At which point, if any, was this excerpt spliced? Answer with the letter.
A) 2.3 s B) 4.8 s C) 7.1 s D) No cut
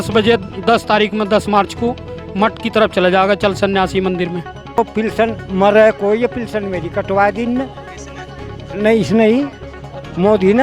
B